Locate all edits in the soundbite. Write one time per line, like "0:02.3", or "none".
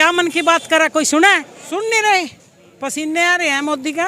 0:01.5